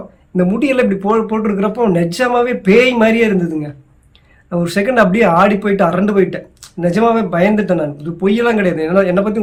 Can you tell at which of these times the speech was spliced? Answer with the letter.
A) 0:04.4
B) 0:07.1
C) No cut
C